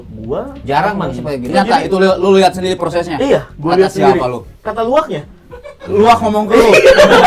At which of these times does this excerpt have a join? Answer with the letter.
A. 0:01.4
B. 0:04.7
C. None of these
A